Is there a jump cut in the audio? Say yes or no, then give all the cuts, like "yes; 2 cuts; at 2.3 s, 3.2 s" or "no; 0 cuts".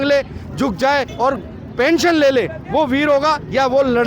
yes; 1 cut; at 1.1 s